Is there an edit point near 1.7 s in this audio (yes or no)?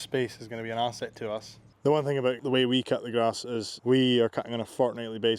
yes